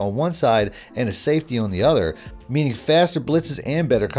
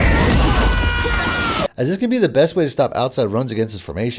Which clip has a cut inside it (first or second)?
second